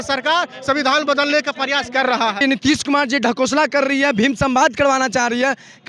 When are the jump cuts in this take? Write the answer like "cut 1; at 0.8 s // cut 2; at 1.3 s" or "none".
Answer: cut 1; at 2.4 s